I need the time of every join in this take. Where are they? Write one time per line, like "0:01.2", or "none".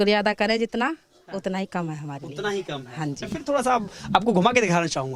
none